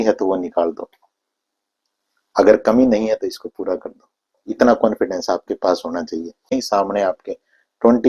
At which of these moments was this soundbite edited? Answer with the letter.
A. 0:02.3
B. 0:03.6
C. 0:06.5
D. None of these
C